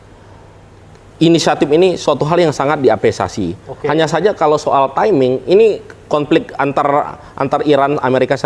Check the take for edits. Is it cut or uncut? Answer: uncut